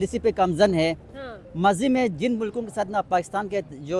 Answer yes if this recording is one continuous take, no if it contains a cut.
yes